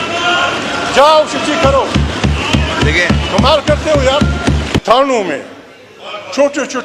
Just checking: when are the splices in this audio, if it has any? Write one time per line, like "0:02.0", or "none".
0:04.8